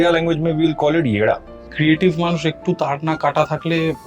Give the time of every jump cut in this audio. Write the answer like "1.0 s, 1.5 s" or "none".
1.5 s, 3.2 s